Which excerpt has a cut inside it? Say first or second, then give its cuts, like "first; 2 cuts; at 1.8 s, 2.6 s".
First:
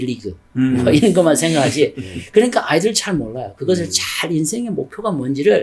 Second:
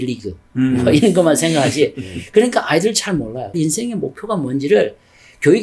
second; 1 cut; at 3.5 s